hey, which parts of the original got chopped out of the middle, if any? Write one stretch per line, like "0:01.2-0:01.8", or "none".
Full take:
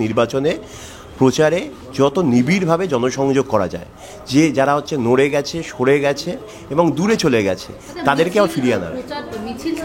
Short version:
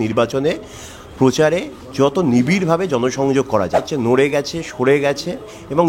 0:03.9-0:04.9

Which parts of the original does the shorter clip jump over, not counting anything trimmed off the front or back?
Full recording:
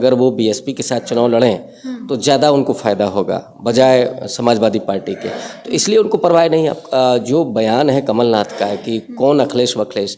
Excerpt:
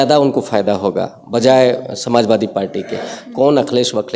0:05.5-0:09.0

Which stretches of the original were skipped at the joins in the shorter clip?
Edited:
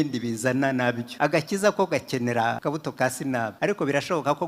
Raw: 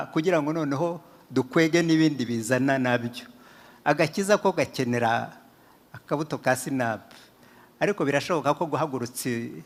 0:03.1-0:03.7
0:05.2-0:06.0
0:07.0-0:07.7

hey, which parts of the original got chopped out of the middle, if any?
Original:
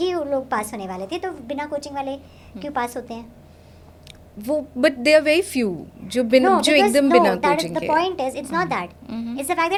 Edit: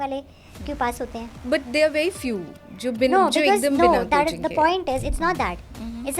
0:03.3-0:04.7

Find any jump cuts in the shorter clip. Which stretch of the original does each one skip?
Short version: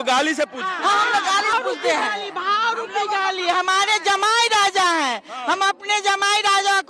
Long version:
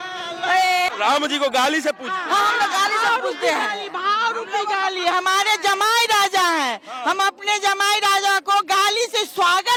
0:03.0-0:03.1

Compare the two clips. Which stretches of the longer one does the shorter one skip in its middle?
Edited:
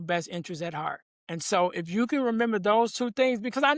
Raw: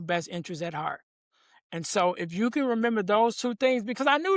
0:01.1-0:01.6

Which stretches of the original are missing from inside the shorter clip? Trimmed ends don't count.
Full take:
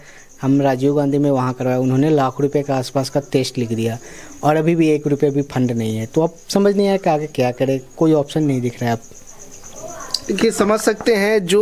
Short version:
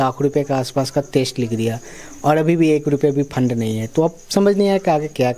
none

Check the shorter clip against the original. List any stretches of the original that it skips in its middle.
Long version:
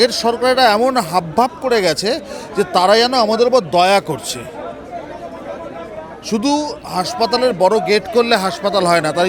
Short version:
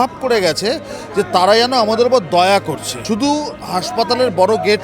0:04.3-0:06.1

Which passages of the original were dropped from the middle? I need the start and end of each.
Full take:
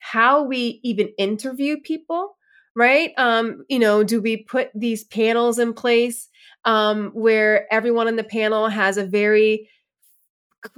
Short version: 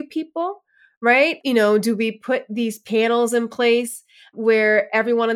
0:03.1-0:03.6
0:06.5-0:07.1

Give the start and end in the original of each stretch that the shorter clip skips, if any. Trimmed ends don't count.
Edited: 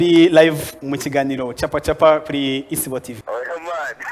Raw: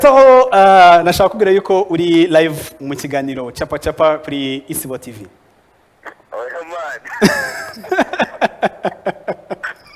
0:05.1-0:06.2

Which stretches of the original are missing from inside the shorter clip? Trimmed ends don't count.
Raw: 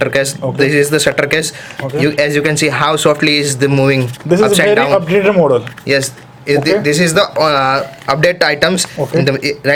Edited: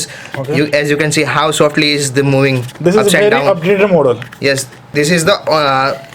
0:06.4-0:06.8

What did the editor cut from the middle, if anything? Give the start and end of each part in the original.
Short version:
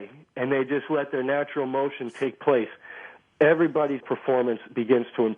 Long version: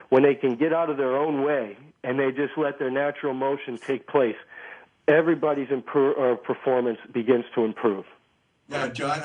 0:05.7-0:06.4

